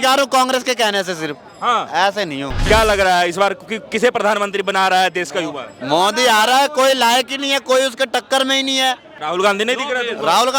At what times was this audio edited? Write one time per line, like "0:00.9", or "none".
0:02.7
0:09.1